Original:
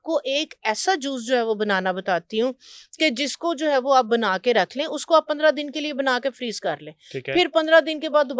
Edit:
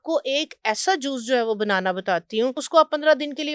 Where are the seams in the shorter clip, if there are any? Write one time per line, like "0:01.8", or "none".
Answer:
0:02.6